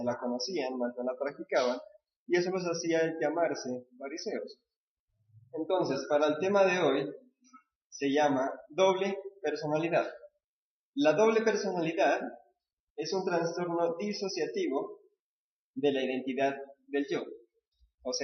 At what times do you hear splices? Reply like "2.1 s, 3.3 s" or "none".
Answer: 8.2 s